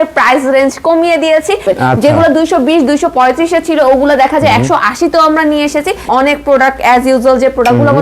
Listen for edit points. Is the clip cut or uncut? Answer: cut